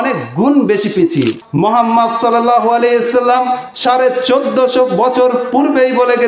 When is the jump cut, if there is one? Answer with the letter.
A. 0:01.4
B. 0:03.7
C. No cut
A